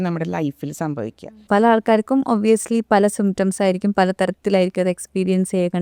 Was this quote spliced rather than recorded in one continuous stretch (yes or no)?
yes